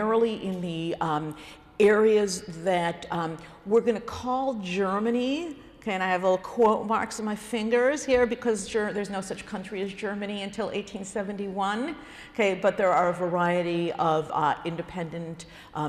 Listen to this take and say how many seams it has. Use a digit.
1